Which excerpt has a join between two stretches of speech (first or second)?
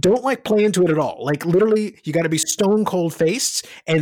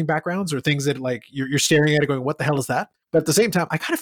second